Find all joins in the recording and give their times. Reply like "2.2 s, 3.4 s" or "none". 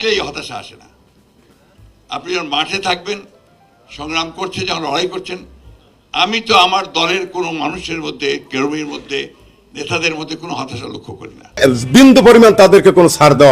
11.6 s